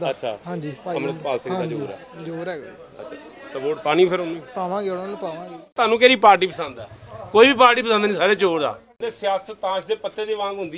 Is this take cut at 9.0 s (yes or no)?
yes